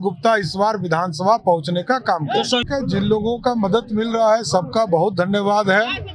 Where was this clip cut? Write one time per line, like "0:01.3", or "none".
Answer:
0:02.6